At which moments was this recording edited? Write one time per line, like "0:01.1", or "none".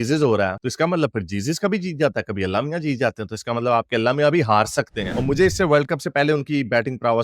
0:05.1